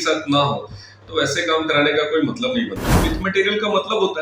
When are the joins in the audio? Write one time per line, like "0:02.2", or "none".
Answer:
0:02.9